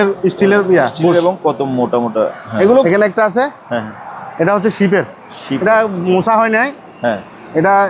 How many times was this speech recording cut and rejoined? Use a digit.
1